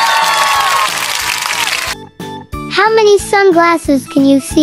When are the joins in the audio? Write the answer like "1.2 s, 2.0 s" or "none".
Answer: 1.5 s